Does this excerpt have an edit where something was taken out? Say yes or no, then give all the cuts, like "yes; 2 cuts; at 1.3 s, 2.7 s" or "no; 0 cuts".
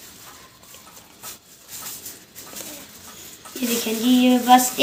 no; 0 cuts